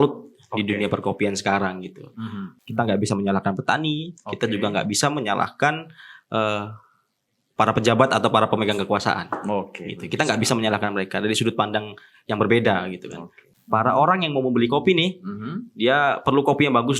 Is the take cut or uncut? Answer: cut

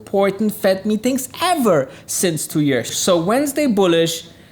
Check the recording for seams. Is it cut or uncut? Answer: cut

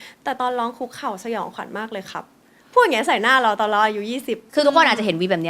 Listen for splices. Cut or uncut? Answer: cut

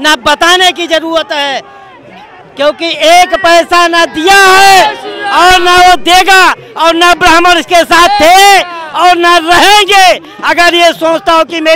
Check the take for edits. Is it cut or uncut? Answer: uncut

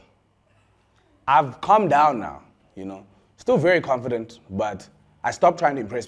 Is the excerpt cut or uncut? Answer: cut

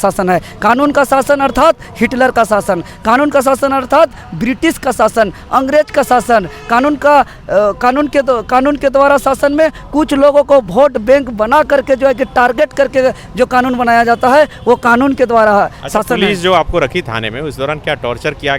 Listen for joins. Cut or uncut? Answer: uncut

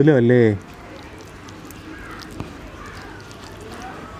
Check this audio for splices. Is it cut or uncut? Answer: uncut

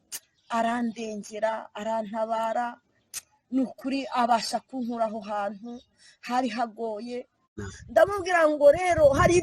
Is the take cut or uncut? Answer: cut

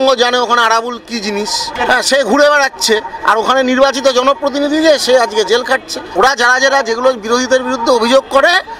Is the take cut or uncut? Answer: cut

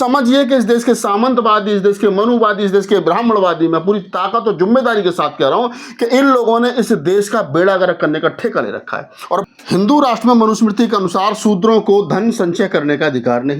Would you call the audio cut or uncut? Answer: cut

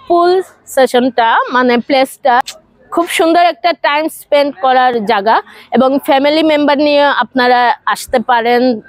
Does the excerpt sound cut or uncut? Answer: uncut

